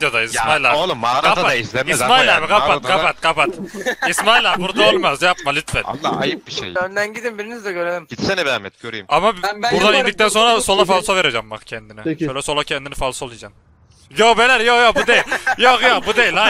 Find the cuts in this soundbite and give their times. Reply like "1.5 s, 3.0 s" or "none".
6.7 s